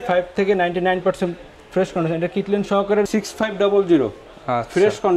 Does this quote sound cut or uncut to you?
cut